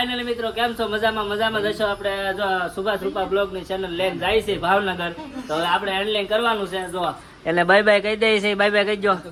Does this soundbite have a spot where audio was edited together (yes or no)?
no